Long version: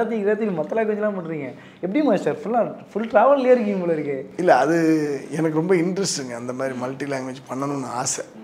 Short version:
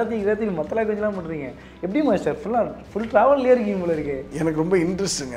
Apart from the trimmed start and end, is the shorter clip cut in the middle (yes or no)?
yes